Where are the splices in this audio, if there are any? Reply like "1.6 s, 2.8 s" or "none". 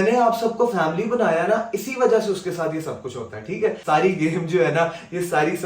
3.8 s